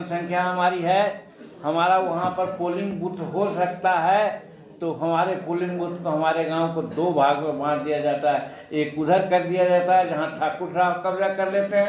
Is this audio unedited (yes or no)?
yes